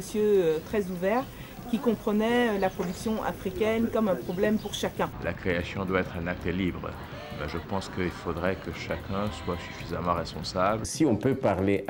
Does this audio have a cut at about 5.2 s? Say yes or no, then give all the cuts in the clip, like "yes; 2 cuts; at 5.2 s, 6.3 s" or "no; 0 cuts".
yes; 2 cuts; at 5.2 s, 10.9 s